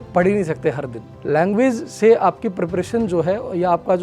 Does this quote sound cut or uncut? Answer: cut